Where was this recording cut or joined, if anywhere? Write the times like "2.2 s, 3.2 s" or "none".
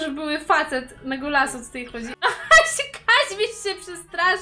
2.1 s